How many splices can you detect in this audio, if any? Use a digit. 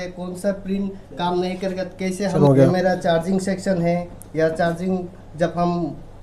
1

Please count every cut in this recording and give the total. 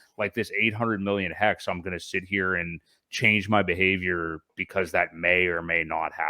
1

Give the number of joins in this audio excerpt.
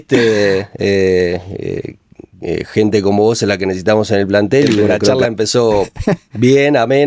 1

